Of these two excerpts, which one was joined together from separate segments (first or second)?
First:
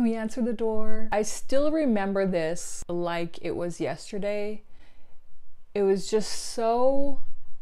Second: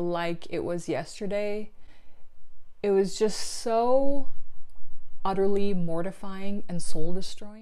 first